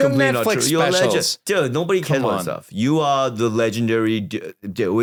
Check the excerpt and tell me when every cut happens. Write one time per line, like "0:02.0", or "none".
none